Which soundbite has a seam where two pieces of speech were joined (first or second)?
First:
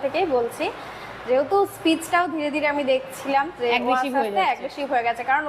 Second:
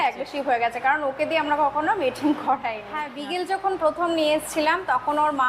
second